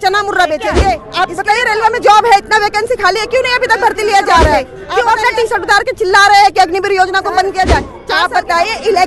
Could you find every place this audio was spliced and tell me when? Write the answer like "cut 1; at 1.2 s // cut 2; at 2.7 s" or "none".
cut 1; at 1.1 s // cut 2; at 4.8 s // cut 3; at 8.0 s